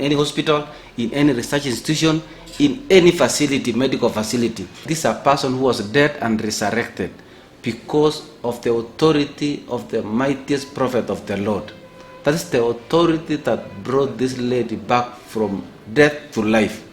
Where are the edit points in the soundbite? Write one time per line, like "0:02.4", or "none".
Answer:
0:04.7